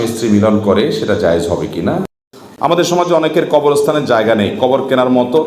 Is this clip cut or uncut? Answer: cut